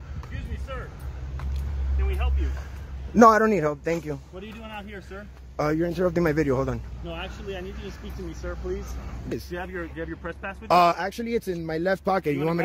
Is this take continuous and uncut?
no; 1 cut; at 9.3 s

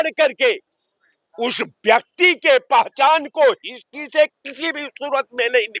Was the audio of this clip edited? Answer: no; 0 cuts

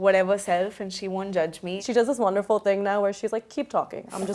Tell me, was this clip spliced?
yes; 1 cut; at 1.8 s

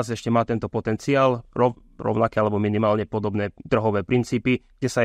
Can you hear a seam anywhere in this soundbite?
no; 0 cuts

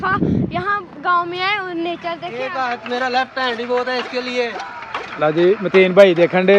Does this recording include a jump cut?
yes; 1 cut; at 2.3 s

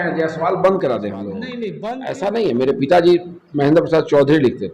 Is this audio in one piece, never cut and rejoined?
no; 1 cut; at 1.7 s

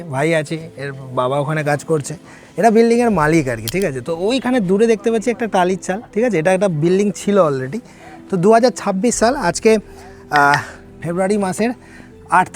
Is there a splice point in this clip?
no; 0 cuts

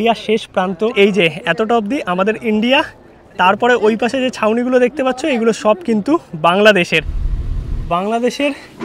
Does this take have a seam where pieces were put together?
yes; 2 cuts; at 0.9 s, 7.7 s

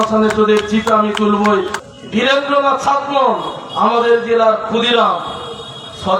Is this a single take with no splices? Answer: no; 1 cut; at 1.8 s

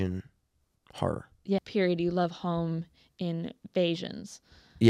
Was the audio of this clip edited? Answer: yes; 1 cut; at 1.7 s

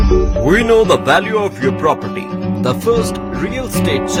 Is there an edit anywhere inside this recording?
no; 0 cuts

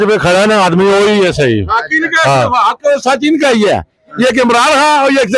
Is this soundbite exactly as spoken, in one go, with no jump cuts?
yes; 0 cuts

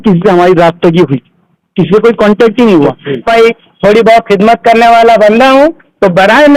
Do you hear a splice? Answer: yes; 1 cut; at 3.3 s

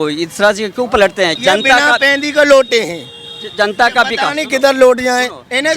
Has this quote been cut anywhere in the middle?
yes; 1 cut; at 1.4 s

